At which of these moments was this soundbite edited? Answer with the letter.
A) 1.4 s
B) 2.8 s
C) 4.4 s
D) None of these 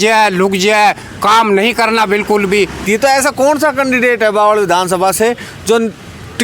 B